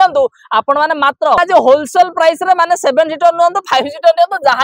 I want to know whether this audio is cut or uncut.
cut